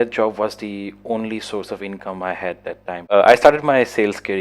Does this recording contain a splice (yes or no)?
yes